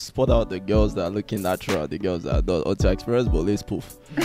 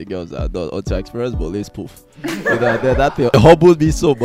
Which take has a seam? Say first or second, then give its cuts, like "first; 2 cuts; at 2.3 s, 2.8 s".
second; 1 cut; at 3.3 s